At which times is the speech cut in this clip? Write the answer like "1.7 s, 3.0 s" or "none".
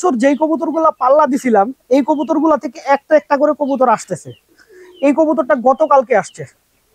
none